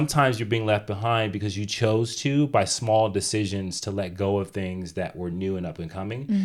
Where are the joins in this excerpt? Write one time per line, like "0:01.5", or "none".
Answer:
none

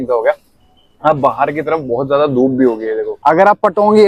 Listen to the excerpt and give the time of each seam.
0:03.1

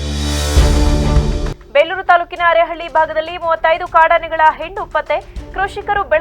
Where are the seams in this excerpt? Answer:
none

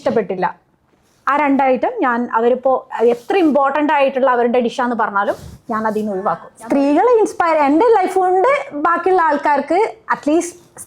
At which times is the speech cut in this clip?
0:06.5

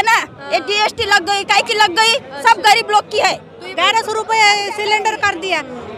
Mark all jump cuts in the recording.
0:03.7

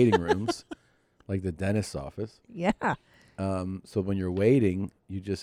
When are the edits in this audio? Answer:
none

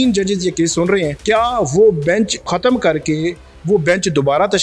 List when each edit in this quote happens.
0:01.1
0:02.5

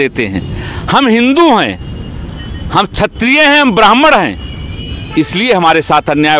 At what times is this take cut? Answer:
none

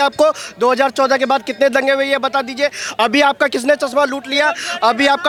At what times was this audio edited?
none

